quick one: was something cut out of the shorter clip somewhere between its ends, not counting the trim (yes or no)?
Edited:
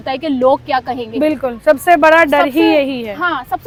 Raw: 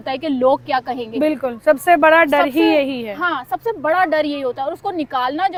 no